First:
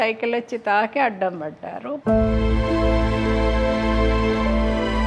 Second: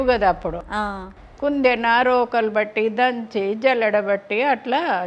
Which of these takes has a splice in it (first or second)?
first